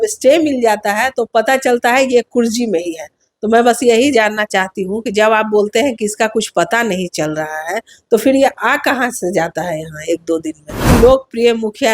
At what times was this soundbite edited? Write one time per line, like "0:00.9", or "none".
0:10.9